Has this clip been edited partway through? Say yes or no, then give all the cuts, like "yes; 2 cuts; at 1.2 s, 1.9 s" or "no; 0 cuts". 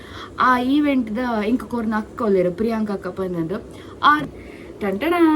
yes; 1 cut; at 4.3 s